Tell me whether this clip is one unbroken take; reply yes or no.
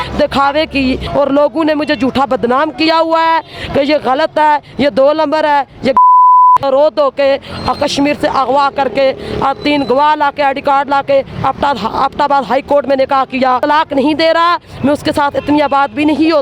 no